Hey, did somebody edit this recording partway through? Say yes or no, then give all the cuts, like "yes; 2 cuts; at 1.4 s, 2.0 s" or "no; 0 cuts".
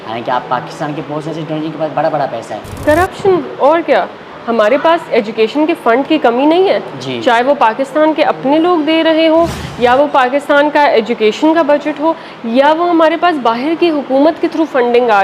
yes; 1 cut; at 2.7 s